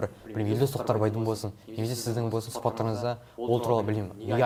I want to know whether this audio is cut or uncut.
uncut